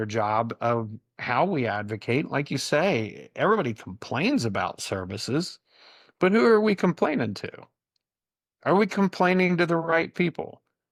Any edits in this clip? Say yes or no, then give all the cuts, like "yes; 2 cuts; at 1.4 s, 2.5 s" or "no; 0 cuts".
no; 0 cuts